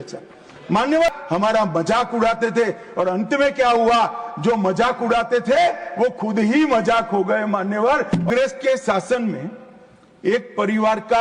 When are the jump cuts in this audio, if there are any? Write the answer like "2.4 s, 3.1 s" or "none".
1.1 s, 8.3 s

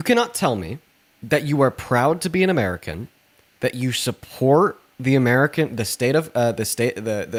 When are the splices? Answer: none

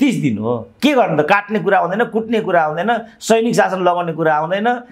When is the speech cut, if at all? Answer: none

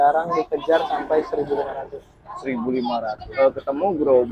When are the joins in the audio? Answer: 3.2 s

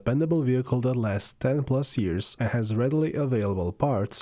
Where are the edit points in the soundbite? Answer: 2.3 s

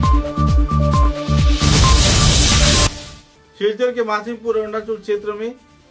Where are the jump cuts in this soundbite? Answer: 2.9 s

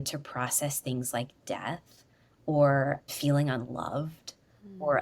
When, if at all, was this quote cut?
3.1 s

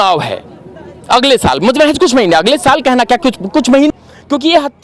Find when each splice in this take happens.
3.9 s

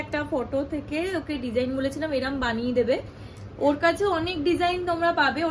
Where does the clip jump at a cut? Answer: none

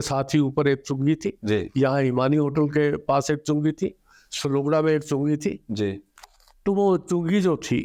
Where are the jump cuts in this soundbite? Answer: none

